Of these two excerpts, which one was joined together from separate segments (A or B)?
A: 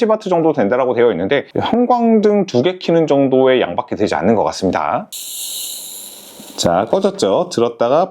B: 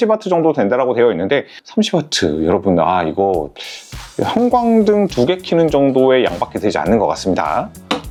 A